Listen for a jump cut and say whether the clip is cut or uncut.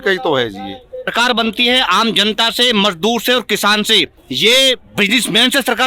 cut